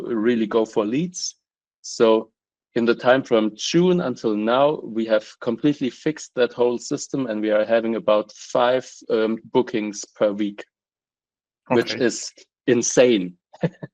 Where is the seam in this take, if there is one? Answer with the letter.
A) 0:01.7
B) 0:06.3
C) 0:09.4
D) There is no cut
C